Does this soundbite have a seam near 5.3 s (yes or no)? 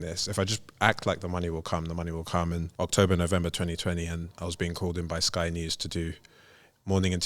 no